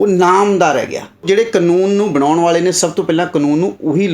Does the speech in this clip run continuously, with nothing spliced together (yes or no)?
no